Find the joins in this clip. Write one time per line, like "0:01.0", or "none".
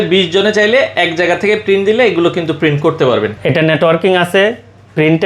0:03.4